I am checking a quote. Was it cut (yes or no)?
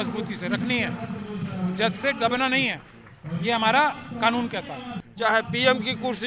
yes